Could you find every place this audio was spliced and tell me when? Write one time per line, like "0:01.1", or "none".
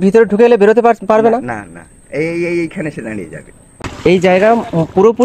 0:03.6